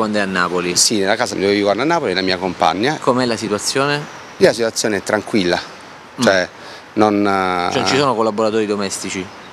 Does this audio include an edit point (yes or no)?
yes